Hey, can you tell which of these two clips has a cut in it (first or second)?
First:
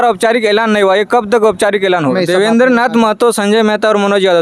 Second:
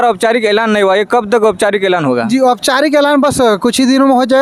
first